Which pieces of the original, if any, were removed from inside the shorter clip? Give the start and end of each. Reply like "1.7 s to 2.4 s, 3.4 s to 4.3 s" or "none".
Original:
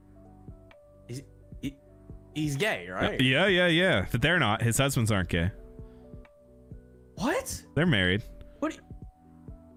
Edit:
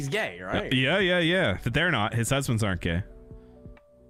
none